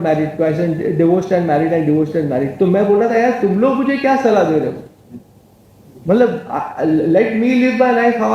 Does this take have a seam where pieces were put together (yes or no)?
no